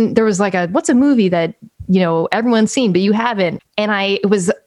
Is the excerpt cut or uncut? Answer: cut